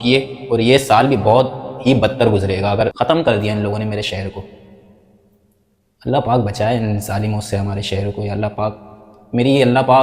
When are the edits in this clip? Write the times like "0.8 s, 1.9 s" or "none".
3.0 s